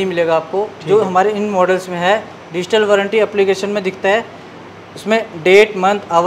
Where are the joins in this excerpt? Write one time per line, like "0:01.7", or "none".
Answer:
none